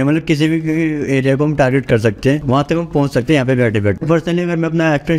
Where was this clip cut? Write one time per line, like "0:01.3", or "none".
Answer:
0:04.0